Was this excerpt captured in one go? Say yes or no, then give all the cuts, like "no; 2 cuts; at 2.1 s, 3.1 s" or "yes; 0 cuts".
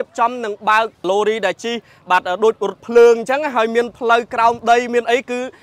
no; 1 cut; at 1.0 s